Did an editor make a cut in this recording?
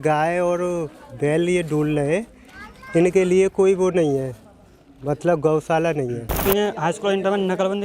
yes; 1 cut; at 6.4 s

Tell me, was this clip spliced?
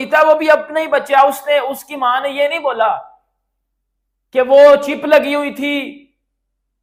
no; 0 cuts

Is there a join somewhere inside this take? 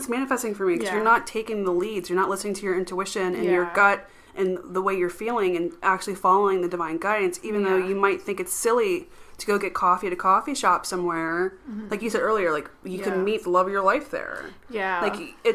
no; 0 cuts

